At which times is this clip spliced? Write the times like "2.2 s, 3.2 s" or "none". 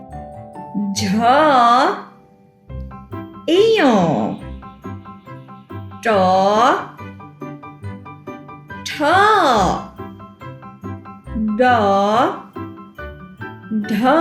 0.7 s, 7.0 s, 8.5 s